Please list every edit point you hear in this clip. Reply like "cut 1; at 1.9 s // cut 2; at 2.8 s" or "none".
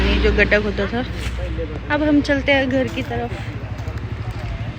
none